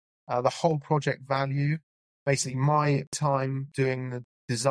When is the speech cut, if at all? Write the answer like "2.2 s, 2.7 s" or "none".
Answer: 3.3 s